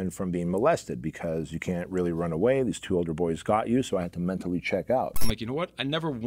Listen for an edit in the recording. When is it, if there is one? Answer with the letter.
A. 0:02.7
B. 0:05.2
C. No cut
B